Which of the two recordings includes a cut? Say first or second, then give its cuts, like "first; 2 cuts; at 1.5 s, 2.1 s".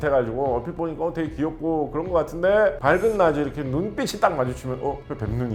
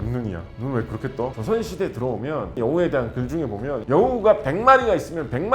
second; 3 cuts; at 1.4 s, 2.6 s, 3.8 s